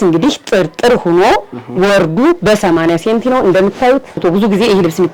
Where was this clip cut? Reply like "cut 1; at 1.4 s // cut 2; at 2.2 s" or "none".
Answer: cut 1; at 4.2 s